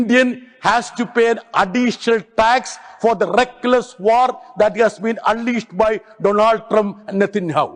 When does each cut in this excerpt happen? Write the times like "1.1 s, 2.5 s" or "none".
none